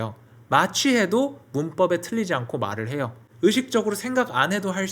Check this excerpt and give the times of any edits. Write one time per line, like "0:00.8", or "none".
0:03.2